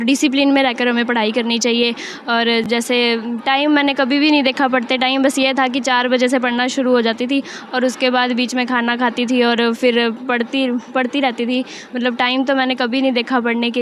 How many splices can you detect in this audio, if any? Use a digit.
0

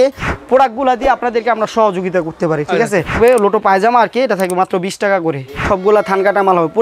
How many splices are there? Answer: 2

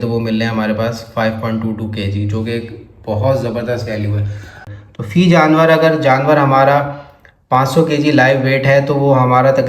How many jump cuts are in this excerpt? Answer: 1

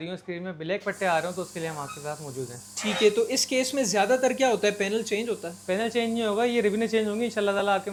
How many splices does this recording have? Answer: 0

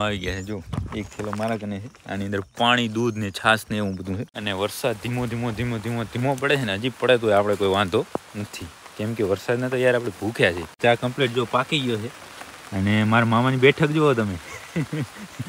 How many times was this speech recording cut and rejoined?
2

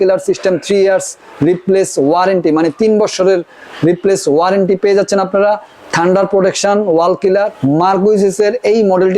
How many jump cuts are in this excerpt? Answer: 1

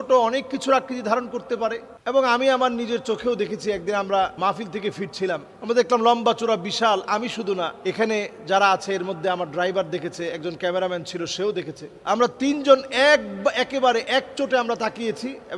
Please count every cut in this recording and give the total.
1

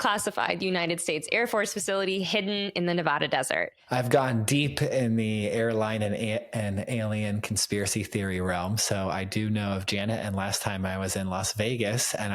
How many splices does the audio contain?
1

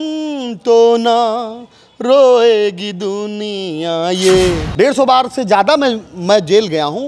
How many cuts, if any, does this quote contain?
1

